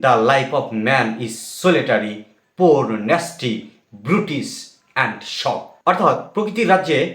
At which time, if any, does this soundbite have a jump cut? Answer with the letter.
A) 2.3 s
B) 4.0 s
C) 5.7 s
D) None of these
C